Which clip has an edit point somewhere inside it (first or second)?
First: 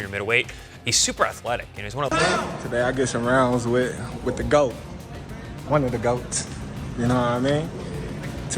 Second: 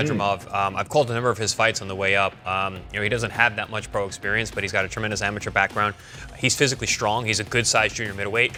first